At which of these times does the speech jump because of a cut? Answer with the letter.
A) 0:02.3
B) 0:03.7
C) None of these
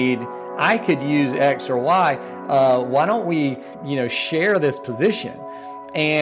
B